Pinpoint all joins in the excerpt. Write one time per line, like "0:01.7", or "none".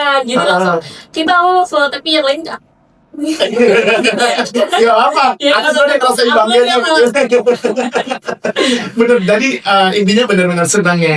none